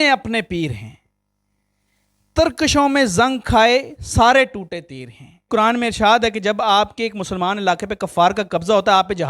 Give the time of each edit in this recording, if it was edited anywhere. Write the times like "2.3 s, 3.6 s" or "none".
5.4 s